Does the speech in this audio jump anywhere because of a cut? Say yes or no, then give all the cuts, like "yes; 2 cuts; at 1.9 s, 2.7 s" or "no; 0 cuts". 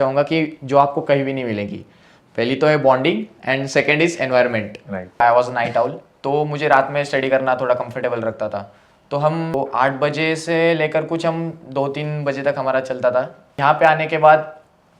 yes; 3 cuts; at 5.2 s, 9.5 s, 13.5 s